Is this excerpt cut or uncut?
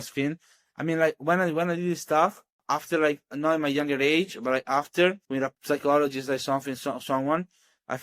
cut